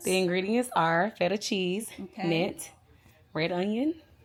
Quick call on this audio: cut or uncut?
uncut